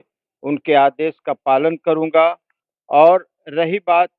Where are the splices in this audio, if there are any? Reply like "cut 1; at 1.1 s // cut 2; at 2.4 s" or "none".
none